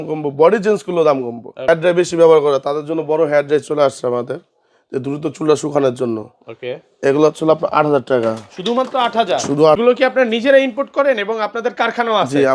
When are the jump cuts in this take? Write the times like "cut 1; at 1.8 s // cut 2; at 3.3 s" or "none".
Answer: cut 1; at 1.7 s // cut 2; at 9.8 s